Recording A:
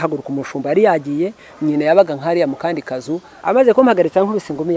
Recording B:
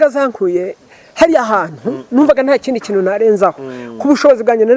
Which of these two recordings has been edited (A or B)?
A